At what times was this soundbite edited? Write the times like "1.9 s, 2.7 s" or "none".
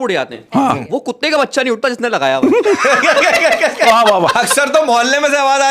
none